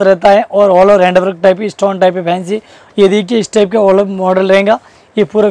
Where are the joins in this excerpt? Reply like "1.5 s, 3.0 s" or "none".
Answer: 2.8 s

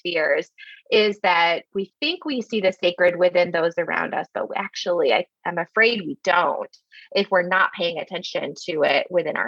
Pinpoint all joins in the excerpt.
1.7 s

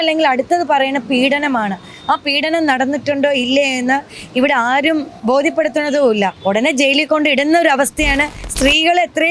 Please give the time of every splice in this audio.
5.2 s, 6.4 s, 8.4 s

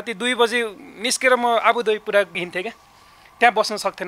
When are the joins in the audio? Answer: 2.4 s

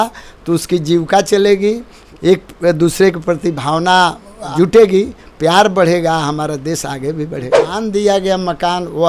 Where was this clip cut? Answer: 2.0 s, 7.6 s

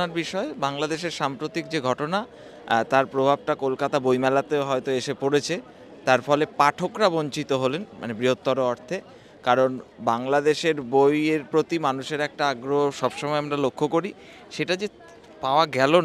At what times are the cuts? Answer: none

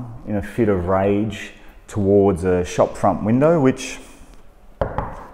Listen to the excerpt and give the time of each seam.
none

